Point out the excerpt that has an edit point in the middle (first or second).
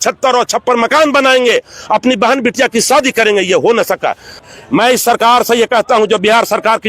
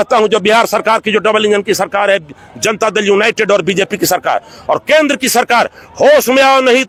first